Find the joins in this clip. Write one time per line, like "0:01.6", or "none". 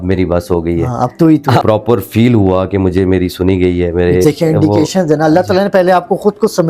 0:01.6
0:04.2